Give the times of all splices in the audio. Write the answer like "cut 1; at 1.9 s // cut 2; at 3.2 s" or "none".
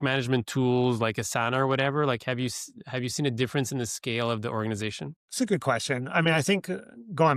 none